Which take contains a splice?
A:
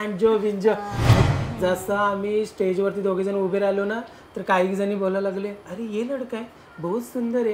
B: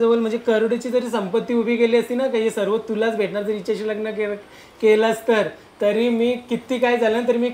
A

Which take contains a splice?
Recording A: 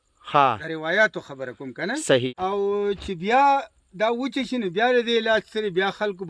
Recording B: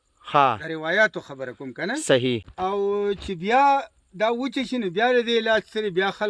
A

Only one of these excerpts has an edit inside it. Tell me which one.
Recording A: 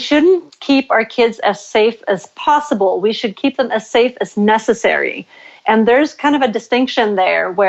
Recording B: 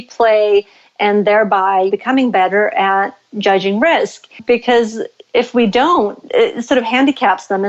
B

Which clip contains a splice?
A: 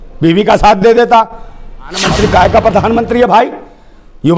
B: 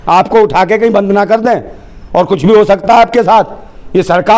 A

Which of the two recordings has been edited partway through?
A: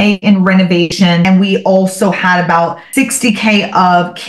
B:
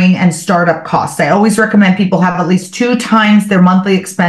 A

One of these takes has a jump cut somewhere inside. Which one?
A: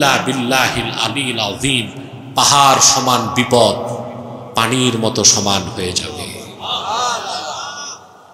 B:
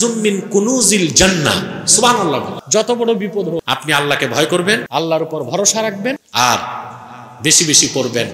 B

